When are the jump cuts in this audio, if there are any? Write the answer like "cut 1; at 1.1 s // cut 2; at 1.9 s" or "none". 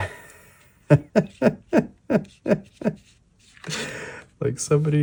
none